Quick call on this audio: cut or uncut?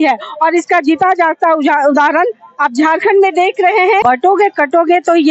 cut